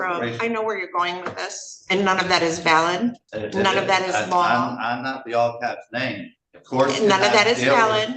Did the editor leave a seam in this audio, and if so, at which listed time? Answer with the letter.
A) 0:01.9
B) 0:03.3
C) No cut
B